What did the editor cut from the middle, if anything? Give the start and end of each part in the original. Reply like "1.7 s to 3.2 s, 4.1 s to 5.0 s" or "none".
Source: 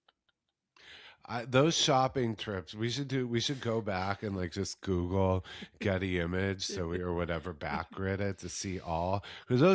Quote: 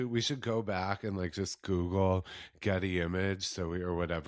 none